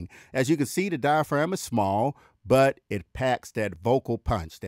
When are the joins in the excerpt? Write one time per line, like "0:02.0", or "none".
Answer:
none